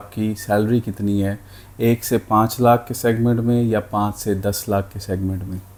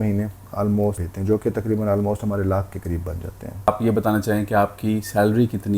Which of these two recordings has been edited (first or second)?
second